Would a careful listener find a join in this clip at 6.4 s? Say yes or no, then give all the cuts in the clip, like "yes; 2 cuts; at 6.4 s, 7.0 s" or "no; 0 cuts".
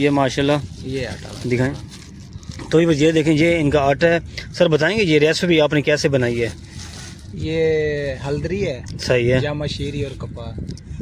no; 0 cuts